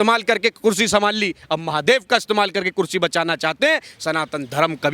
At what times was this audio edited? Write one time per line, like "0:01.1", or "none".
0:03.9

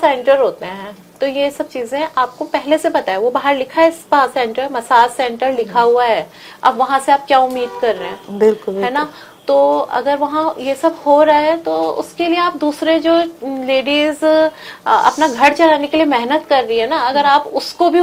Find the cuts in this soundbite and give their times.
none

